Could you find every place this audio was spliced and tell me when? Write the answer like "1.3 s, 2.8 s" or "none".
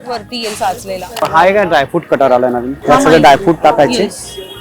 1.1 s, 2.7 s

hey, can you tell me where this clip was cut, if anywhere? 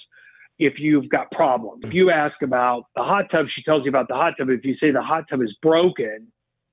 1.9 s

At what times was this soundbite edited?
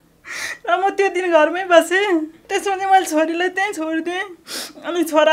2.4 s

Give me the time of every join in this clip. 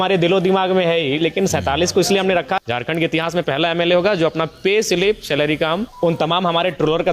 2.6 s, 5.9 s

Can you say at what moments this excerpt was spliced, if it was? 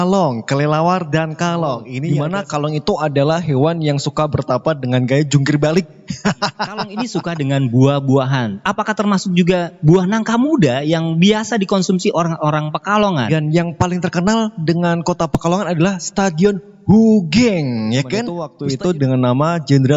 1.9 s, 7.0 s, 13.3 s, 18.5 s

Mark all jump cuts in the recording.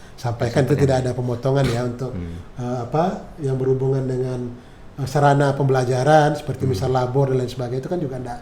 none

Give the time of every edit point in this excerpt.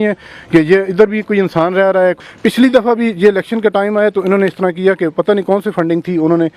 none

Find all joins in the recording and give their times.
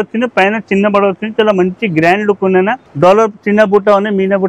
2.8 s

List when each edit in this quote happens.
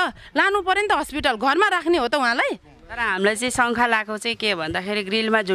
3.0 s

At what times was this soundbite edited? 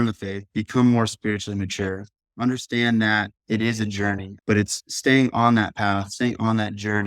4.4 s

